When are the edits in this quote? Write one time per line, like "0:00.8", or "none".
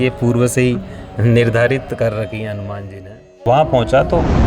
0:03.4